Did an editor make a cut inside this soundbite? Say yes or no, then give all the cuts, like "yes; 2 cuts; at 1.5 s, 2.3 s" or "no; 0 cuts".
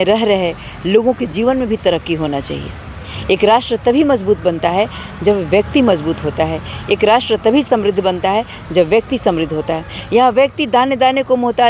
no; 0 cuts